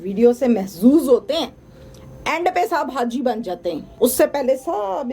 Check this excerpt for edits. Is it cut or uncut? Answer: cut